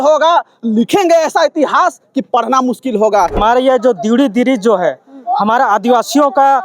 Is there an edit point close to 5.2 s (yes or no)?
no